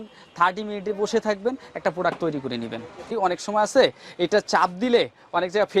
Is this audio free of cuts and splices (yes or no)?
no